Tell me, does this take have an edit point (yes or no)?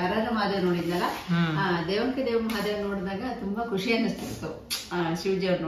no